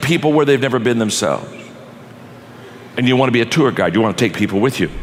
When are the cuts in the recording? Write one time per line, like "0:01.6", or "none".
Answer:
none